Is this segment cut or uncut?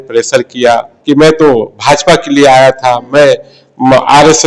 cut